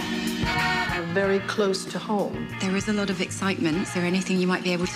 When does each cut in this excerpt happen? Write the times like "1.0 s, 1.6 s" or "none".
1.0 s

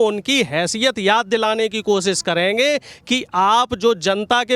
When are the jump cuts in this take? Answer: none

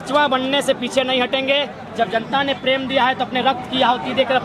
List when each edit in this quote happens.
none

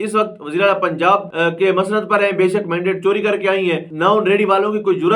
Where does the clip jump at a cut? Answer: 1.3 s, 3.9 s

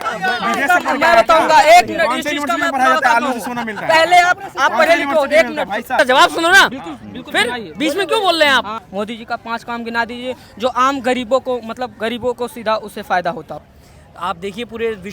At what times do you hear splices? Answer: 6.0 s, 8.8 s, 13.7 s

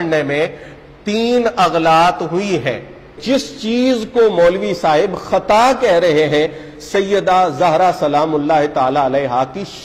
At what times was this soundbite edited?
3.2 s

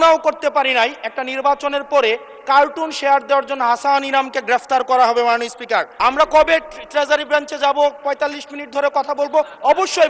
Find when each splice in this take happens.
6.0 s

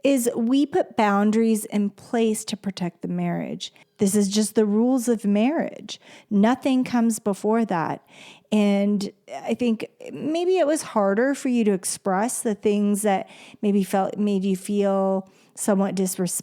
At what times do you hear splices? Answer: 3.8 s

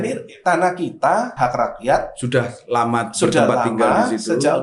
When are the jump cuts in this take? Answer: 1.4 s

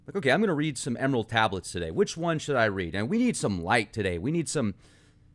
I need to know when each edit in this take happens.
none

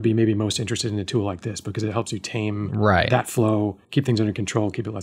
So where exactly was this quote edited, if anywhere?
2.9 s, 3.8 s

